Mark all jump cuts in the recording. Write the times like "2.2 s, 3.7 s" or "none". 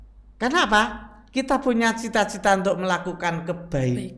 none